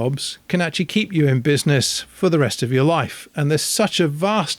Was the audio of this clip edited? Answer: no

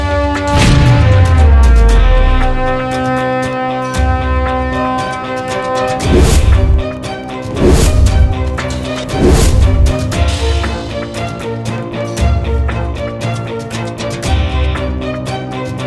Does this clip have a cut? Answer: no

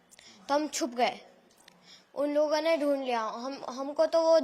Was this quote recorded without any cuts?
yes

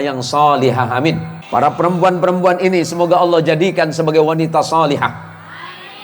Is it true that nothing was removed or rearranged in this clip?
no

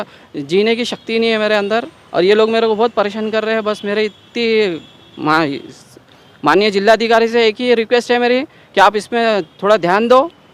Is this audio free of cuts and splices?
yes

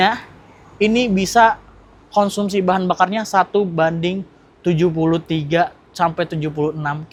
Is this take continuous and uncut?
yes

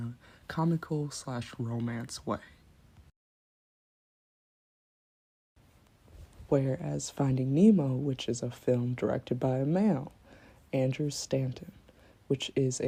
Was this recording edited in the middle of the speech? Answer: no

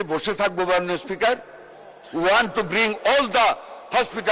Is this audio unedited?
yes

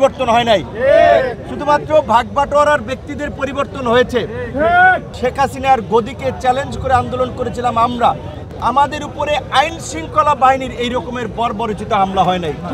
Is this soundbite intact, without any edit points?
no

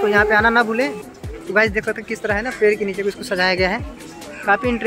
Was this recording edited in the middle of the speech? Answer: yes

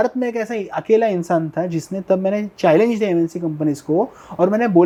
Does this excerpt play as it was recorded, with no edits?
yes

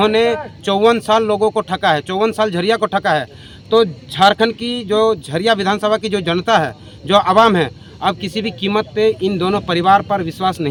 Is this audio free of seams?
yes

